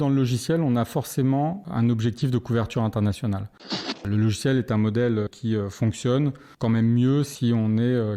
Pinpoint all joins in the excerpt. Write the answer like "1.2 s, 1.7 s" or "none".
4.0 s, 5.3 s, 6.5 s